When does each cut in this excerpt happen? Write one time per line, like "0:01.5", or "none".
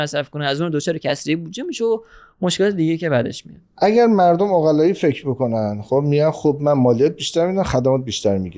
0:03.4